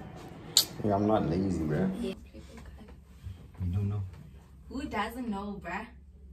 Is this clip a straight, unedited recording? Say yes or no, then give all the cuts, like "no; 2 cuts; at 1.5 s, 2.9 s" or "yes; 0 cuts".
no; 1 cut; at 2.1 s